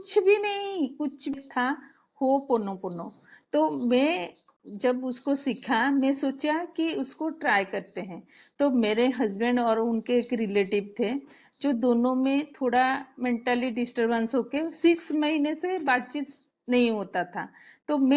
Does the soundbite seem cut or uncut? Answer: cut